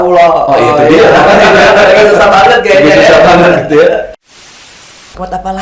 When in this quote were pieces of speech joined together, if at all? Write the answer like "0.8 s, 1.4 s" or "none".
4.7 s